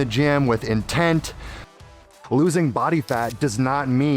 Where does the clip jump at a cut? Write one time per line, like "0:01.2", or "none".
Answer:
0:02.0